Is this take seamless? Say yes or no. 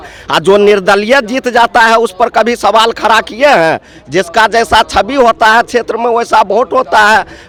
yes